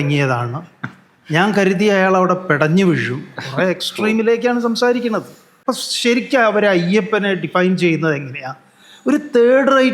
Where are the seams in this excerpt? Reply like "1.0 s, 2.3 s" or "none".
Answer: 5.5 s